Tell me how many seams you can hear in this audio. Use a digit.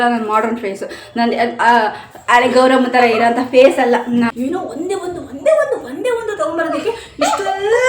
1